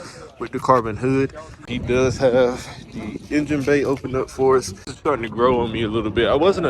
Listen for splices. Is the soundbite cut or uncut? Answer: cut